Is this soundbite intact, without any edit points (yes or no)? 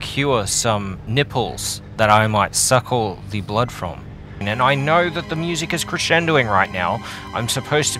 no